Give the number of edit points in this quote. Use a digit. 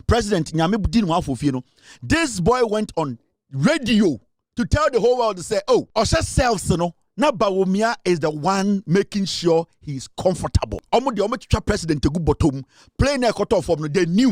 2